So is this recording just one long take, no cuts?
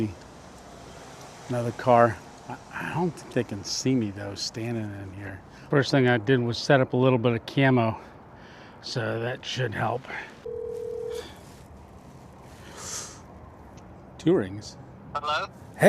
no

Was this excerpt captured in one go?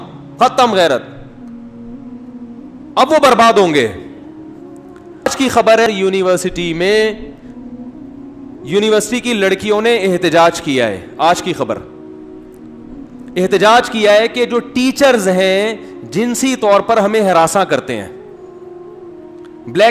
yes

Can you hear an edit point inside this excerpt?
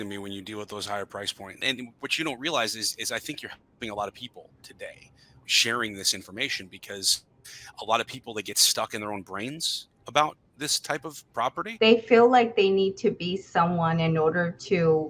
yes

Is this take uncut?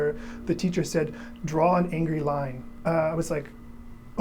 no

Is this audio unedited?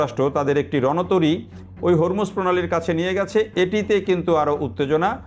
yes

